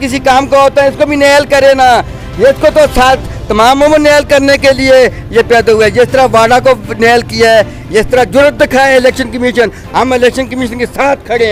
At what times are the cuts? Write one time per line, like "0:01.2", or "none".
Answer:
none